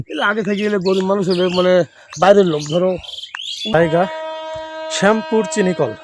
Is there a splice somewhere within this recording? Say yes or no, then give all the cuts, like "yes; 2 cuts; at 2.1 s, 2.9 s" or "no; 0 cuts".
yes; 1 cut; at 3.7 s